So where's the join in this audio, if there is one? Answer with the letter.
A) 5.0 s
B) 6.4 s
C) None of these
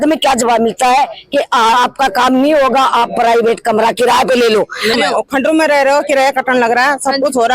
A